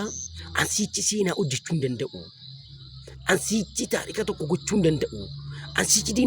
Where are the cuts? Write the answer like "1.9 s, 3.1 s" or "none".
4.1 s